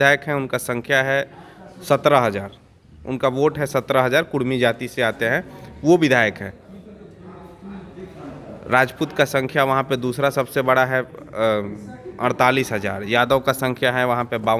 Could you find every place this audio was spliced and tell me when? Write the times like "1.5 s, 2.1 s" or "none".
none